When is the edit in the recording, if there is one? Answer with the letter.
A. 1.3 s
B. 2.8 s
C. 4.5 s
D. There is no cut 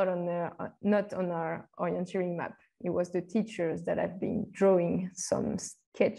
D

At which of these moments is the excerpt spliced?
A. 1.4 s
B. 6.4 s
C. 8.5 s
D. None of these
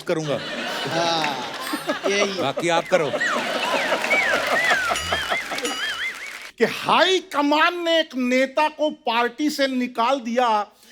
B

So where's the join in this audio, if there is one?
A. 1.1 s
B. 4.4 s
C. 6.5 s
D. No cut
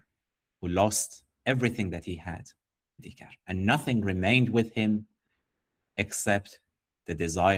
D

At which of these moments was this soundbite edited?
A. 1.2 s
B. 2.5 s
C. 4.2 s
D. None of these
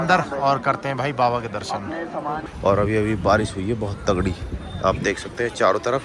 B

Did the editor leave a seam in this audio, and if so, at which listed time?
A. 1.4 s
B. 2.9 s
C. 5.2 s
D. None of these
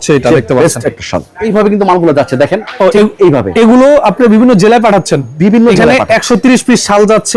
A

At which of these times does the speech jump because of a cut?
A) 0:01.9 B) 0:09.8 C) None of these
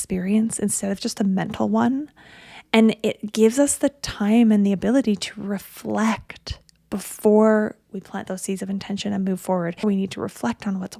B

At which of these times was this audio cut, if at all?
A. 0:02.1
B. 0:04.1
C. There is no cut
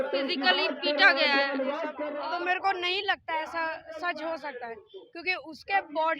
A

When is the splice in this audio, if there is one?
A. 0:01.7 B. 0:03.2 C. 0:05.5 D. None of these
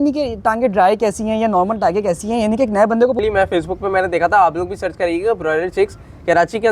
B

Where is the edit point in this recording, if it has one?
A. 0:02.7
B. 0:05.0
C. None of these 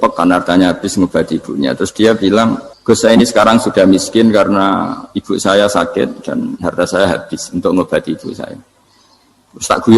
A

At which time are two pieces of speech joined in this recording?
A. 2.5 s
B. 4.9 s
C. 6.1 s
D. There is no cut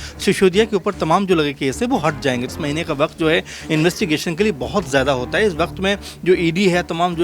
A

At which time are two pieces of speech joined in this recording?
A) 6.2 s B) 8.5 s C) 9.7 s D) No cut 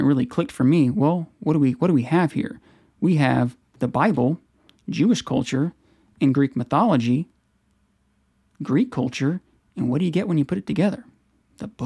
D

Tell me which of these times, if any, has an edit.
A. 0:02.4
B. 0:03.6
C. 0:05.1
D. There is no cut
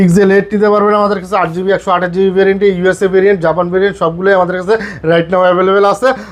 D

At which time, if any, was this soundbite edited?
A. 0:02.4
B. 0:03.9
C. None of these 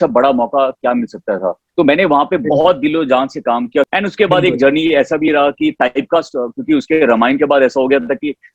B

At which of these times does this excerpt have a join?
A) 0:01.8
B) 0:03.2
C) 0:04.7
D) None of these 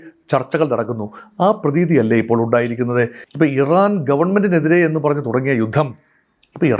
B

